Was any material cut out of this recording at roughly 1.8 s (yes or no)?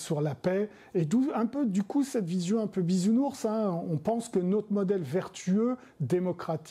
no